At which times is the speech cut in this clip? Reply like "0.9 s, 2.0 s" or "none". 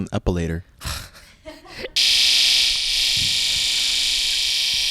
1.9 s